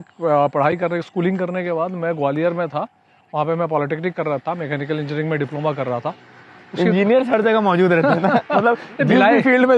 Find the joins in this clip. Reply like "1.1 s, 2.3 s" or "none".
none